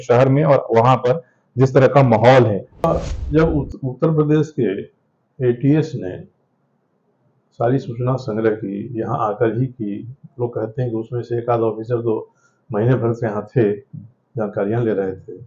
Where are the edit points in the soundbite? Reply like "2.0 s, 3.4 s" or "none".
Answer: 2.9 s